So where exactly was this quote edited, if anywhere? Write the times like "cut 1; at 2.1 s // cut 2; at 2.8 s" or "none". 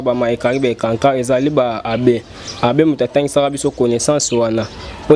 none

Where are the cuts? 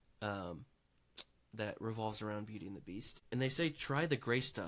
cut 1; at 3.1 s

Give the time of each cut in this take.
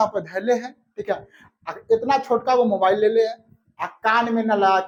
none

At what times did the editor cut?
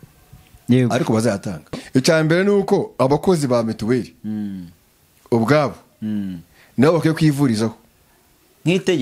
cut 1; at 1.8 s

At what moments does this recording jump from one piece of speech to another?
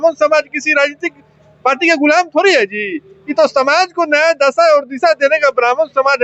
none

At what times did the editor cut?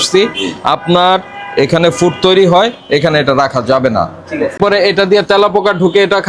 cut 1; at 4.6 s

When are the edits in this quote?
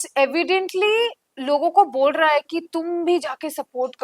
none

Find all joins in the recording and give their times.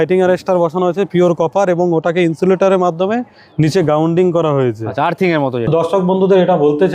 cut 1; at 5.7 s

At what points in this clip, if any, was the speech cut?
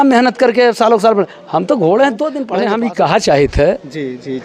cut 1; at 2.5 s

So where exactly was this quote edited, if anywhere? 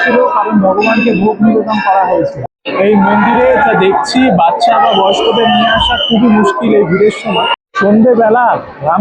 cut 1; at 2.4 s // cut 2; at 7.6 s

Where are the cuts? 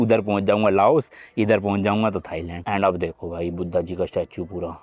none

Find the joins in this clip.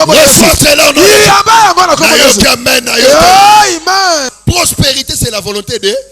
cut 1; at 4.3 s

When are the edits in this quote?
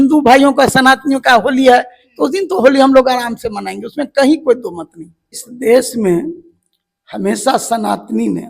cut 1; at 5.4 s

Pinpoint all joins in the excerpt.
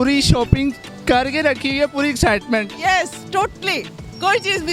none

